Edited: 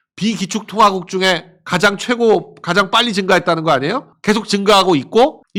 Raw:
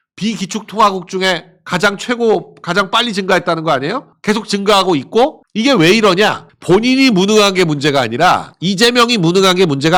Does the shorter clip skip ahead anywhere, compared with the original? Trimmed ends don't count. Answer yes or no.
no